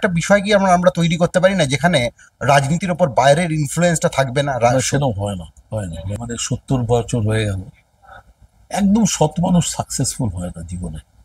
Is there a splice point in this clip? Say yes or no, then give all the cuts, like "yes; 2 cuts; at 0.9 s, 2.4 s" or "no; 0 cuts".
yes; 1 cut; at 6.1 s